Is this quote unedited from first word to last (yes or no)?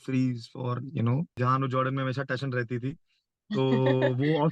no